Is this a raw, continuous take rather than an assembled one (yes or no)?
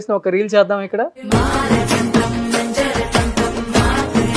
no